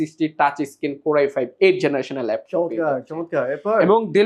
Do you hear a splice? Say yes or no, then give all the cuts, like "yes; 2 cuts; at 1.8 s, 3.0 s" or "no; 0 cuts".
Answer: no; 0 cuts